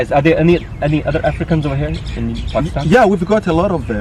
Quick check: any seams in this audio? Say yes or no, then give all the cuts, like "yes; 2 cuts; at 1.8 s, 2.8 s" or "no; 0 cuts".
no; 0 cuts